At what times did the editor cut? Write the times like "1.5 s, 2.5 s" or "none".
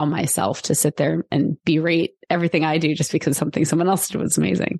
1.6 s